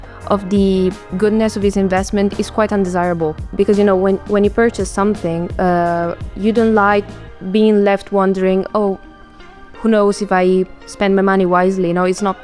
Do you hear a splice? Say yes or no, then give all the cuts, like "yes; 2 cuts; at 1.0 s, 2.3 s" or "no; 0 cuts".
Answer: yes; 1 cut; at 3.5 s